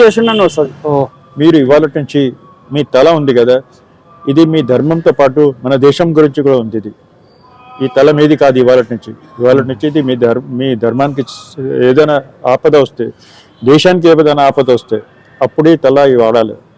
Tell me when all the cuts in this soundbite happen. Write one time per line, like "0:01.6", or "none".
0:01.2